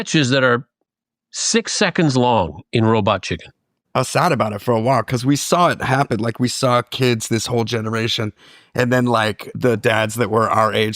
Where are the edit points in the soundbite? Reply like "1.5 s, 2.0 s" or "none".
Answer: 3.7 s